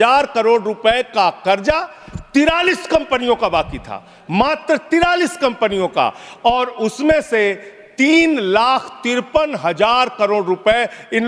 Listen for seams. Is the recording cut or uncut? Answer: uncut